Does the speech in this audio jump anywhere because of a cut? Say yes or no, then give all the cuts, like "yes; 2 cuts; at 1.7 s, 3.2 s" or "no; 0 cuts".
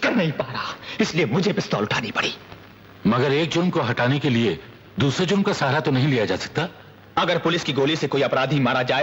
yes; 1 cut; at 6.2 s